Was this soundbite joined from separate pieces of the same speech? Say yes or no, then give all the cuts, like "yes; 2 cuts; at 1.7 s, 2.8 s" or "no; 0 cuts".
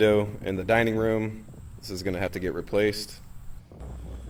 no; 0 cuts